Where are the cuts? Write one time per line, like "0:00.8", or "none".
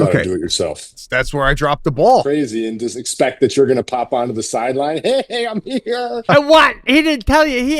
0:01.0
0:02.2
0:06.2